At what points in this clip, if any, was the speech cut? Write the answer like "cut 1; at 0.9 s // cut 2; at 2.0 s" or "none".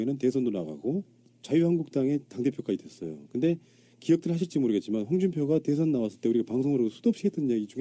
cut 1; at 2.5 s